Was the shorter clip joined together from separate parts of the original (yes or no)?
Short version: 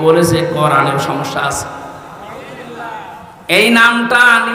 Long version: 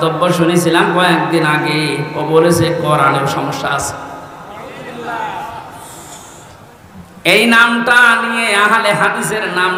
yes